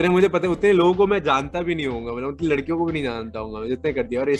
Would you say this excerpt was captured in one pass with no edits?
yes; 0 cuts

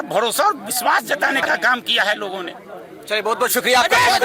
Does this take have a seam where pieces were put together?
no; 0 cuts

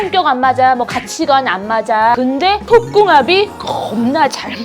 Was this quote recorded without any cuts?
no; 1 cut; at 2.1 s

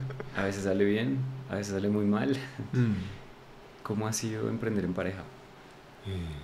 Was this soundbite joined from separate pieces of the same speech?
yes; 1 cut; at 5.5 s

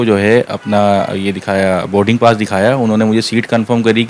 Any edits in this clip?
no; 0 cuts

